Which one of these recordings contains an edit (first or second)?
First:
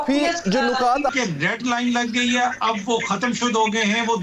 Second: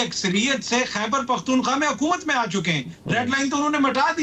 first